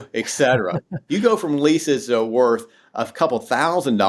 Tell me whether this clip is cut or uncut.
cut